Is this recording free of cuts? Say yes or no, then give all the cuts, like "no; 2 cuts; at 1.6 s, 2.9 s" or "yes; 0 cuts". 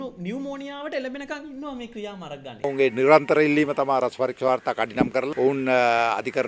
no; 1 cut; at 2.7 s